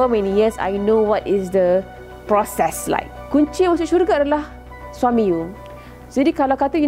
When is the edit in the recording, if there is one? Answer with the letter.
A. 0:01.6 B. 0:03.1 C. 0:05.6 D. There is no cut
B